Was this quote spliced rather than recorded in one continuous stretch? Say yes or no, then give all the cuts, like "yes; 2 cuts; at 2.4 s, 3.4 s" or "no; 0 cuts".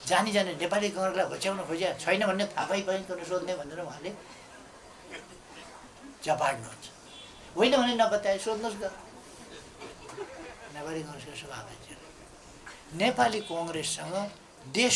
no; 0 cuts